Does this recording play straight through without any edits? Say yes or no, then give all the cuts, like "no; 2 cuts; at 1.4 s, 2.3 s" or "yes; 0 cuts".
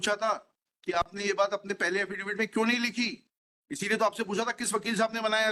yes; 0 cuts